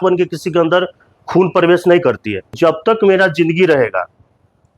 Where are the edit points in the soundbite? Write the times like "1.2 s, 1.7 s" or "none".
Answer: 2.5 s